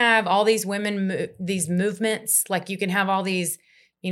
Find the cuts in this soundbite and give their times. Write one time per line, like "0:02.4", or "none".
none